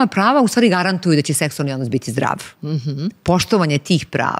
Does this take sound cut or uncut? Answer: uncut